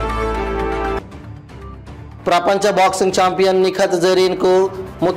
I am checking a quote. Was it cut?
yes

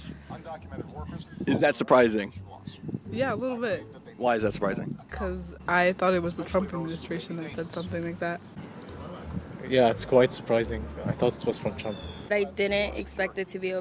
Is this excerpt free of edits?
yes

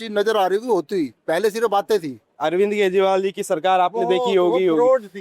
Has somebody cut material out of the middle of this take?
yes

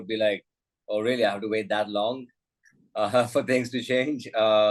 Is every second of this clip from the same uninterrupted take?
yes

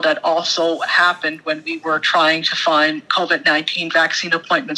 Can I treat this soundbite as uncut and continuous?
yes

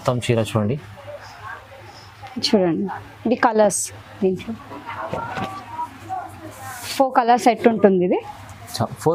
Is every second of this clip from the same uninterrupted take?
yes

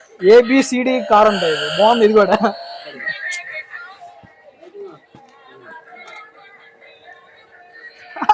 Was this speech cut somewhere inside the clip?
yes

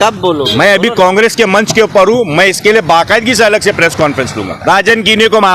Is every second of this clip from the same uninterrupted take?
no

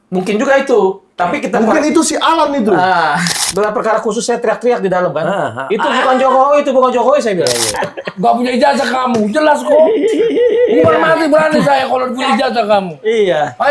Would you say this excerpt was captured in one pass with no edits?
no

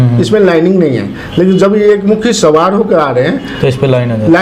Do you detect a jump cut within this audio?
no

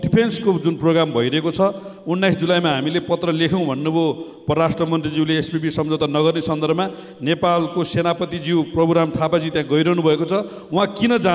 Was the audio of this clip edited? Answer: no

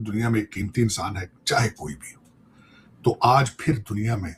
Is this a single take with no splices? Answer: yes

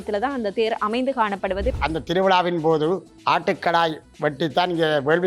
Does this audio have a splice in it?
yes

